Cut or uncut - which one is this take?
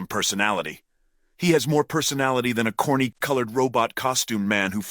uncut